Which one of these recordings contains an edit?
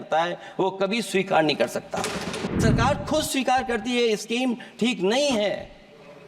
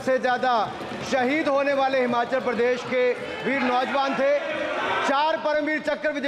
first; 1 cut; at 2.5 s

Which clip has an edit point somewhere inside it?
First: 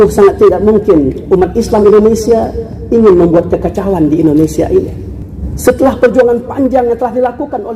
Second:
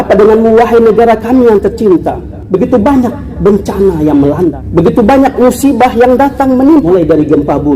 second; 2 cuts; at 4.6 s, 6.9 s

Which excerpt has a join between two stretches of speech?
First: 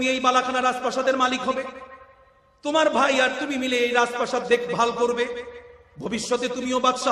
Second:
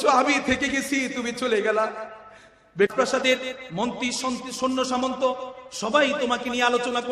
second; 1 cut; at 2.9 s

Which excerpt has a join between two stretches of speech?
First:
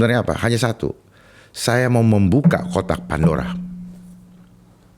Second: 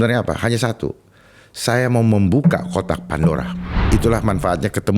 second; 1 cut; at 3.8 s

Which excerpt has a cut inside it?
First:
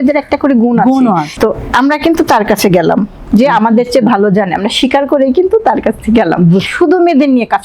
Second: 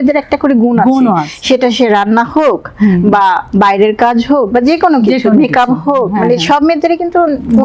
first; 2 cuts; at 1.3 s, 6.7 s

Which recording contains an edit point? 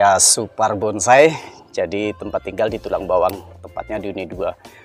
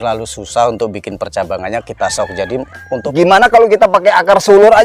second; 1 cut; at 3.0 s

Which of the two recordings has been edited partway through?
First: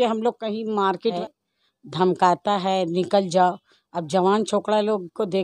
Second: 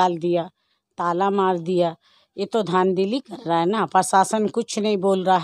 first; 1 cut; at 1.2 s

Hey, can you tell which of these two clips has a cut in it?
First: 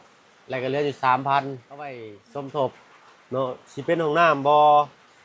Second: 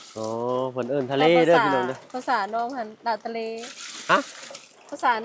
first; 1 cut; at 2.1 s

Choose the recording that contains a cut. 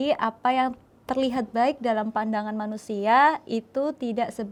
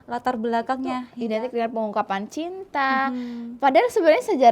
second; 1 cut; at 1.1 s

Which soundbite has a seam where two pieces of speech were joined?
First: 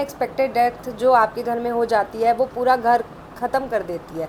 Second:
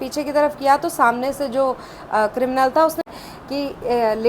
second; 1 cut; at 3.1 s

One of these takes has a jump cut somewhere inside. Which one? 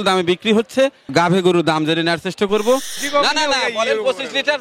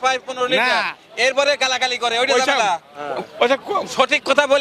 first; 1 cut; at 3.0 s

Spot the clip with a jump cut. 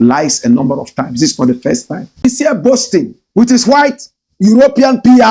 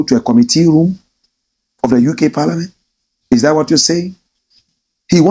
first; 2 cuts; at 2.2 s, 3.2 s

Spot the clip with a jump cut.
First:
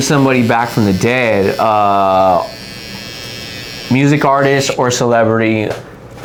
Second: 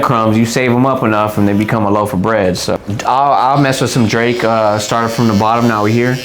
second; 1 cut; at 2.8 s

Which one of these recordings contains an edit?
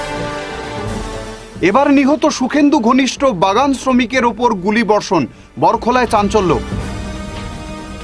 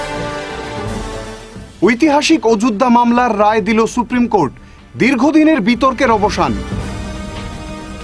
first; 1 cut; at 1.2 s

